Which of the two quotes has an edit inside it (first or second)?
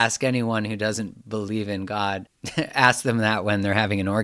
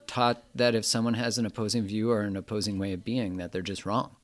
first